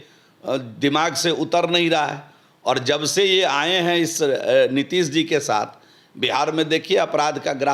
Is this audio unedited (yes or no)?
yes